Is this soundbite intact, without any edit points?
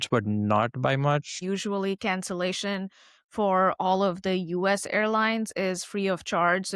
no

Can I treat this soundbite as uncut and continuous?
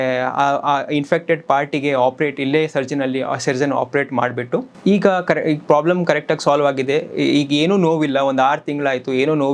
yes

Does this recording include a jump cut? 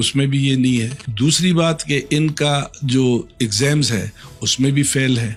no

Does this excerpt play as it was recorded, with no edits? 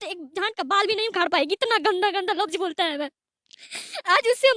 yes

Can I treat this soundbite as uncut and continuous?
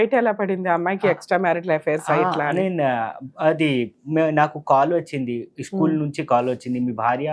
yes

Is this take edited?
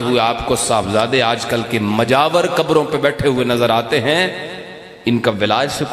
no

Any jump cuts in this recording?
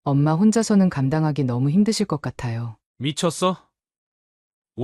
no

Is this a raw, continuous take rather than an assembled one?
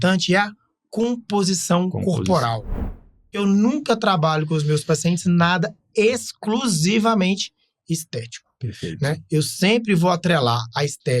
no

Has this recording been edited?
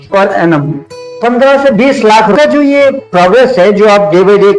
yes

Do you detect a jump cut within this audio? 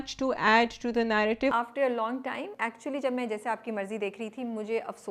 yes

